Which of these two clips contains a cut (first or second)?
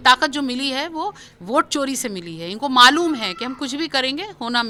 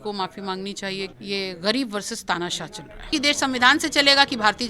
second